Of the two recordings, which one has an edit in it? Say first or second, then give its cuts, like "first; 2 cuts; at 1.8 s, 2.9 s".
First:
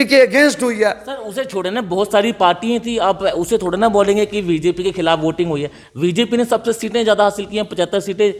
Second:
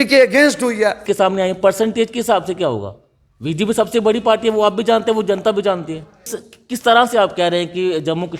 second; 2 cuts; at 1.0 s, 6.4 s